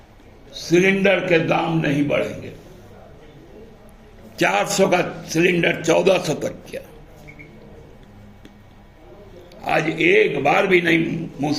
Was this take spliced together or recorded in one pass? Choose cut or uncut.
uncut